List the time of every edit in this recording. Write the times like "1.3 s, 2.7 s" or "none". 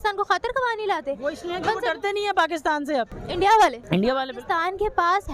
3.2 s, 3.8 s